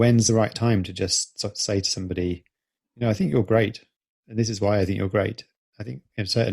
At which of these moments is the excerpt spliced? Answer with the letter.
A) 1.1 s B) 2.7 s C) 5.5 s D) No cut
D